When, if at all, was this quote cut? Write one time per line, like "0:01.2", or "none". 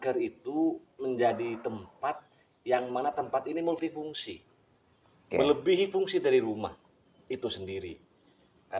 none